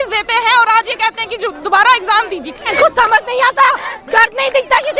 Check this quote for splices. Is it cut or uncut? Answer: cut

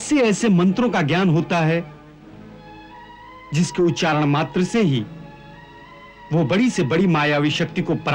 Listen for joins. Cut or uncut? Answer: uncut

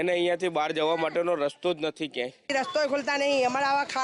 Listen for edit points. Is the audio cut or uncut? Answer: cut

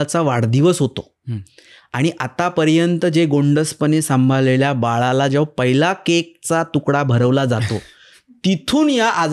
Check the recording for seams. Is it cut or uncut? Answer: uncut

